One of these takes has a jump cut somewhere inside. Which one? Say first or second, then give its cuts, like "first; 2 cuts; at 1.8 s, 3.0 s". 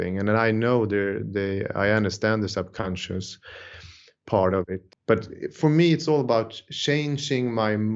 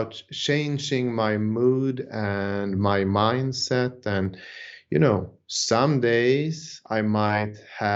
first; 1 cut; at 4.8 s